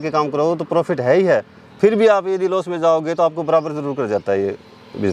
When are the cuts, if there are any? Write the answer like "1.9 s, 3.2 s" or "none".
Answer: none

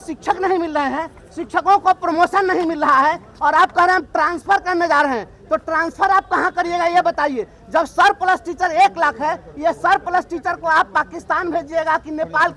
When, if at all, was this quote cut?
none

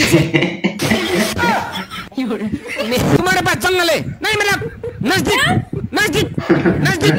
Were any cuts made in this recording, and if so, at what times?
3.2 s

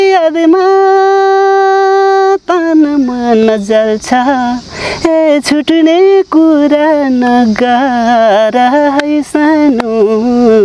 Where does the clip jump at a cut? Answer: none

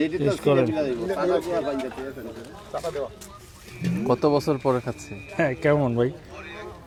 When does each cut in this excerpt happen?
none

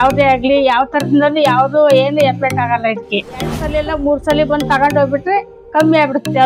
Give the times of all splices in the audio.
3.7 s

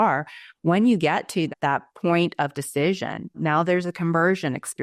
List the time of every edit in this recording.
1.5 s, 3.4 s

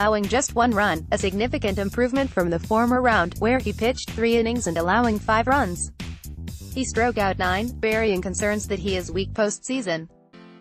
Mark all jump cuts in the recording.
none

